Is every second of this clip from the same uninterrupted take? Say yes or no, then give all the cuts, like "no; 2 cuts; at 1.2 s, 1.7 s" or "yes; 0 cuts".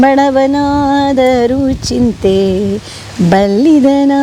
yes; 0 cuts